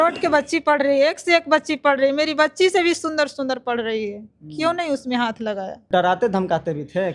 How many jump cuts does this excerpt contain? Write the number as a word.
one